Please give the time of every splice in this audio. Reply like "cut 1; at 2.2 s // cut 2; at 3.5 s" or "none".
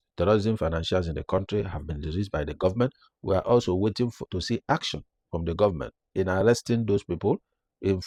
none

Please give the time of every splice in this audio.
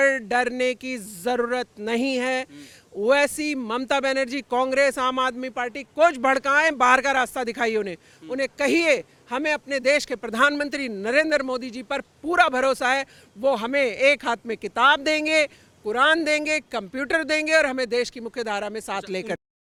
none

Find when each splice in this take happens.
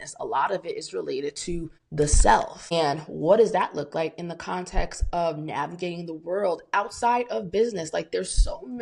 cut 1; at 1.8 s // cut 2; at 2.7 s

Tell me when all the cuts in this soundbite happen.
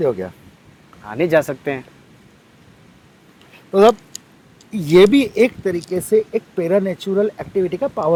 none

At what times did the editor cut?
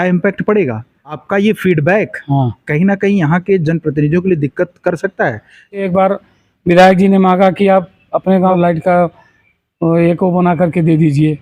cut 1; at 1.2 s // cut 2; at 5.8 s // cut 3; at 8.6 s

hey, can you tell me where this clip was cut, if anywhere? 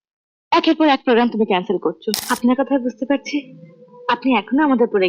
cut 1; at 2.2 s

